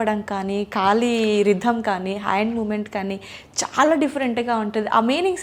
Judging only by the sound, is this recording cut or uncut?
uncut